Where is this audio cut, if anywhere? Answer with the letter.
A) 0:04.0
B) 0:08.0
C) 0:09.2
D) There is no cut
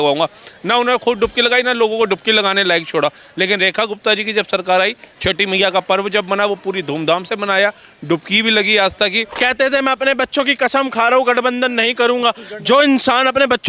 C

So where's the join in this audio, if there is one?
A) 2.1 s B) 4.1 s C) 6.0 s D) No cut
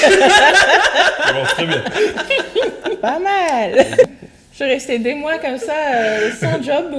B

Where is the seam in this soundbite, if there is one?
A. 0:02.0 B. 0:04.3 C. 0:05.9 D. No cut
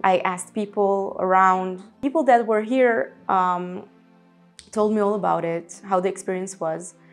A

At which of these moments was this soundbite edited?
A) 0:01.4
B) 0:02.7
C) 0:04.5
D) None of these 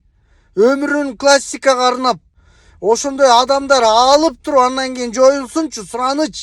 B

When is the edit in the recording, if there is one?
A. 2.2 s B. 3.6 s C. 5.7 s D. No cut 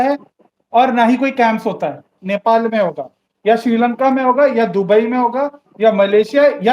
A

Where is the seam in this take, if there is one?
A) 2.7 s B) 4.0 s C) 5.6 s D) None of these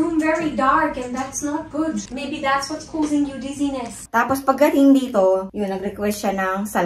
B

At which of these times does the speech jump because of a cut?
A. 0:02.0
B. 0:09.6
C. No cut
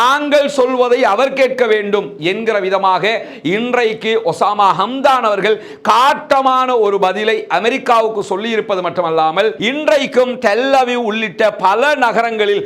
B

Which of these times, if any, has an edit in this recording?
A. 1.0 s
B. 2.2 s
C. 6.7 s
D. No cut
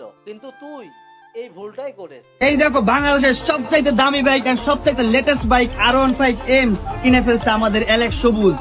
B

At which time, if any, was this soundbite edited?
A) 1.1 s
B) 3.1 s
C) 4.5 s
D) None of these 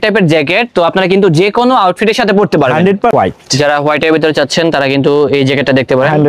B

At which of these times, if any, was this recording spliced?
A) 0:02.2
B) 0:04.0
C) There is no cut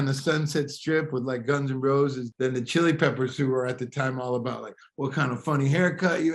A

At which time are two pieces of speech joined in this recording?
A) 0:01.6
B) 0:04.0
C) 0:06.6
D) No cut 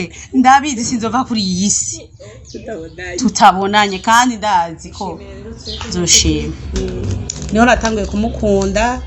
C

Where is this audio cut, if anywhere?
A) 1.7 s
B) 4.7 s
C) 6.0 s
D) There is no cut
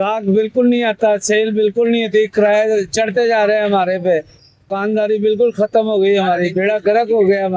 B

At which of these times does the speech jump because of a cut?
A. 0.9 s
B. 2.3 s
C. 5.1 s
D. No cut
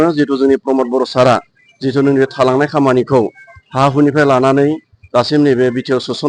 D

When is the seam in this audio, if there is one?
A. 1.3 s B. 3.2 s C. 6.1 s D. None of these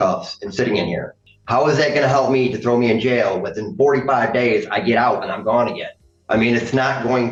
D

